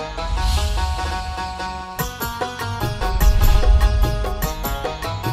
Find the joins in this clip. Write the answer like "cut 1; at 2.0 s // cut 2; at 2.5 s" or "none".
cut 1; at 4.3 s